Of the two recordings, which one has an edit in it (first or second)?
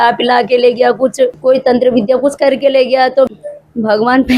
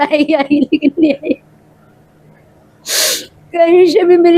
first